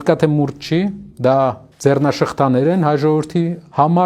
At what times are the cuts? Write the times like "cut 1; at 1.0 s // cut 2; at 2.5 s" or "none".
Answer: cut 1; at 1.1 s // cut 2; at 1.7 s